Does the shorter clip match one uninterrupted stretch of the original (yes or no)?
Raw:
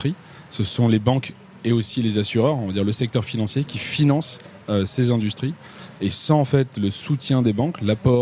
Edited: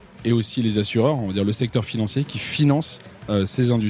yes